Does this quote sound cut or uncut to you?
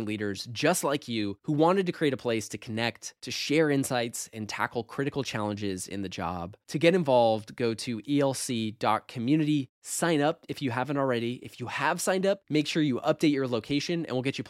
uncut